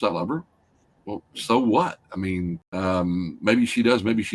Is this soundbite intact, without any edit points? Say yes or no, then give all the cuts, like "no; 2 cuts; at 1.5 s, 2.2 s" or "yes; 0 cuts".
no; 1 cut; at 2.6 s